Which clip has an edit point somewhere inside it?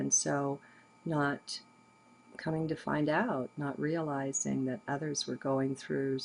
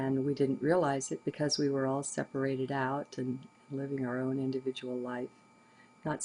first; 1 cut; at 4.6 s

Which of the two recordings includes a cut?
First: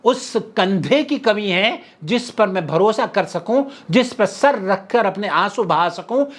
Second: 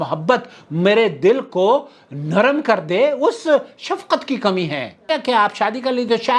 second; 1 cut; at 5.1 s

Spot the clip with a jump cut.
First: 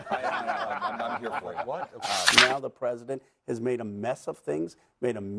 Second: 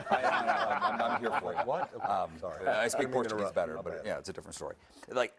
first; 1 cut; at 2.3 s

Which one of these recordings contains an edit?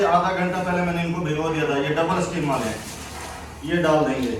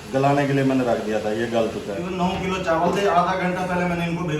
second; 1 cut; at 2.0 s

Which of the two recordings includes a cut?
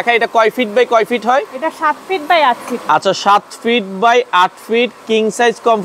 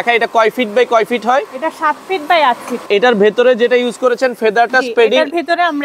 second; 1 cut; at 2.8 s

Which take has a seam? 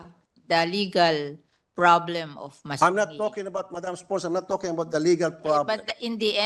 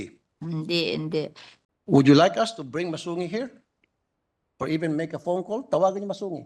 second; 1 cut; at 1.5 s

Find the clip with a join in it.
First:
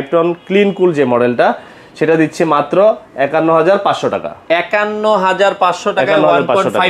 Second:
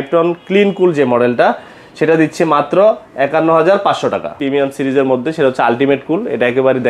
second; 1 cut; at 4.3 s

